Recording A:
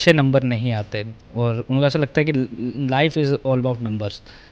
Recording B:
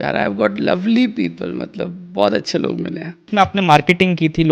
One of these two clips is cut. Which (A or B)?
B